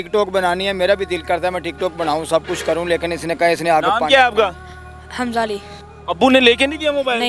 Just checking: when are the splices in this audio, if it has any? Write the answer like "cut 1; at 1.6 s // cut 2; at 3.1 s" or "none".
cut 1; at 5.7 s

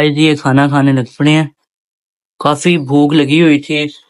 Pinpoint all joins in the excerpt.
none

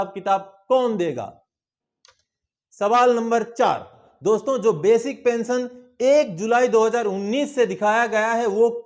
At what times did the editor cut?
none

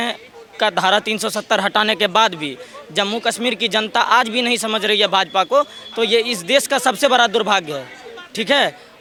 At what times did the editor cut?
none

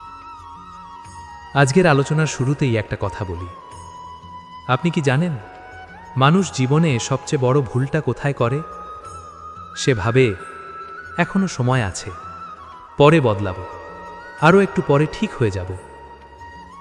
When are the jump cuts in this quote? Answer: cut 1; at 1.5 s

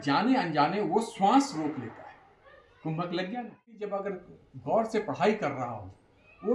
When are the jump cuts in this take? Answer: cut 1; at 3.7 s

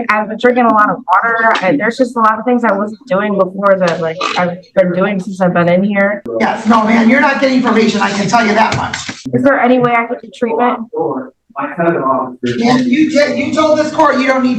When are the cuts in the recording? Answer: cut 1; at 6.2 s // cut 2; at 9.3 s

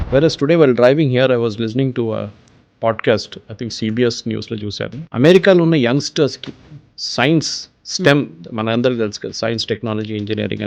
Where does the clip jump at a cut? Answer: cut 1; at 5.0 s

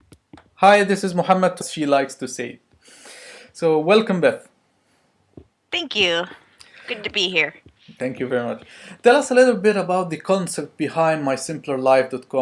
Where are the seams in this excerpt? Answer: none

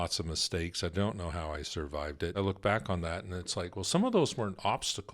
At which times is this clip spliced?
cut 1; at 2.3 s

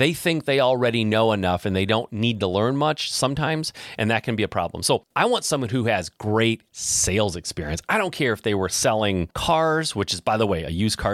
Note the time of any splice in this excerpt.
cut 1; at 5.1 s // cut 2; at 9.3 s

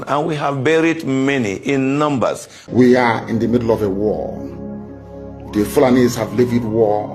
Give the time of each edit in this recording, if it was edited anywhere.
cut 1; at 2.5 s

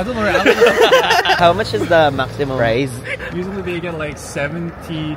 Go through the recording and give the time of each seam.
cut 1; at 1.4 s

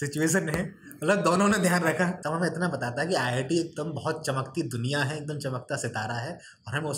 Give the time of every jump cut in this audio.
cut 1; at 2.2 s

